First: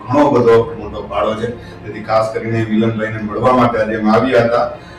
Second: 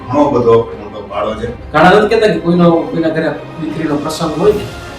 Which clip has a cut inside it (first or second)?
second